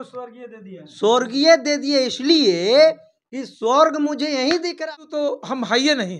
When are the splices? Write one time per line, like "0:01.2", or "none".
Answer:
0:04.7